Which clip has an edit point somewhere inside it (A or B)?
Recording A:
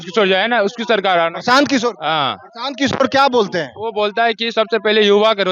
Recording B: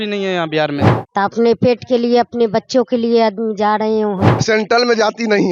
B